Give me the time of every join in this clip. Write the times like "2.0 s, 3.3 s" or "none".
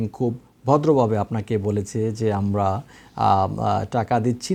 none